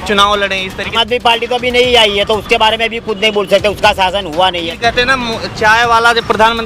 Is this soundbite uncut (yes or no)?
no